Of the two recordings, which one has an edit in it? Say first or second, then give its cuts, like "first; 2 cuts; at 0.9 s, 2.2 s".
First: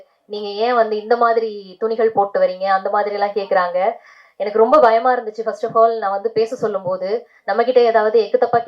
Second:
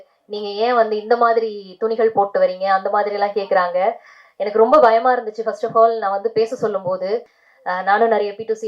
second; 1 cut; at 7.3 s